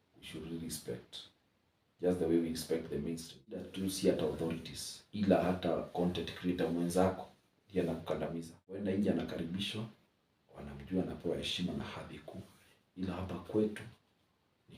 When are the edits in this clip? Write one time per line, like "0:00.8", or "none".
0:03.7
0:08.8